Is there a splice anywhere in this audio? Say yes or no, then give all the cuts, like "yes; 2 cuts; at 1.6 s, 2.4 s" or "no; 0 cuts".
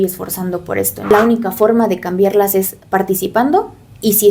yes; 1 cut; at 1.1 s